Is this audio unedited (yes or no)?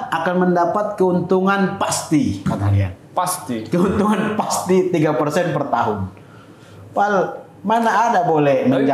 yes